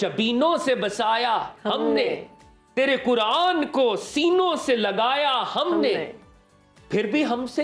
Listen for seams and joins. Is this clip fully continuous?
yes; 0 cuts

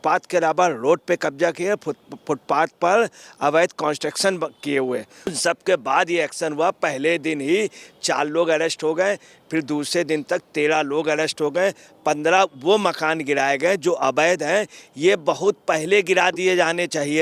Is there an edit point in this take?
yes; 1 cut; at 5.3 s

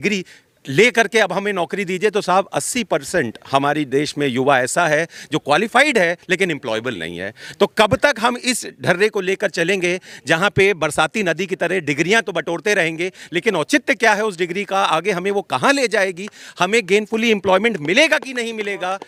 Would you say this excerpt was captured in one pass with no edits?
yes; 0 cuts

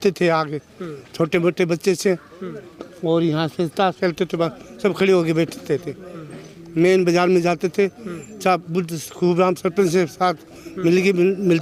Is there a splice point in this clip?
no; 0 cuts

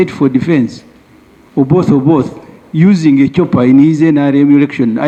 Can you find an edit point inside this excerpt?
no; 0 cuts

